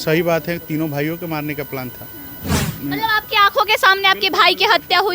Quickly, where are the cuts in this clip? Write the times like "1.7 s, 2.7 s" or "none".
2.7 s